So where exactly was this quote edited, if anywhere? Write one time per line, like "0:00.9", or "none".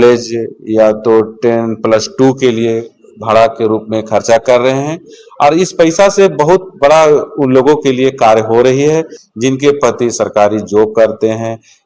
0:09.2